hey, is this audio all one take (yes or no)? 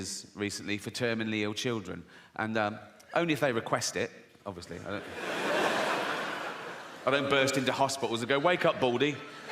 no